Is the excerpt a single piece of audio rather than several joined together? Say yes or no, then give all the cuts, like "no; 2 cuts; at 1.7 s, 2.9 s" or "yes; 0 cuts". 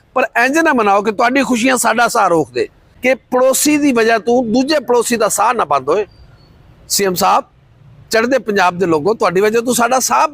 no; 1 cut; at 2.8 s